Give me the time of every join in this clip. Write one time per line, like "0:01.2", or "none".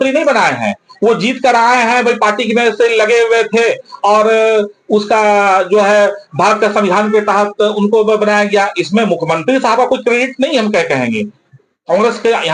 none